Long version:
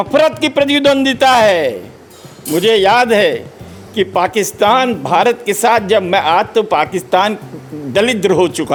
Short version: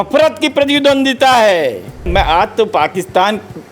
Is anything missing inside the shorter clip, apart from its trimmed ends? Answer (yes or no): yes